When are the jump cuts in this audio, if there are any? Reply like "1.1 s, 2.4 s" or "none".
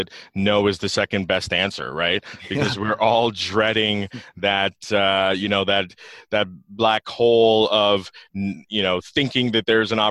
none